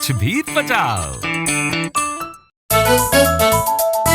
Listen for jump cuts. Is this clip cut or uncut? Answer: cut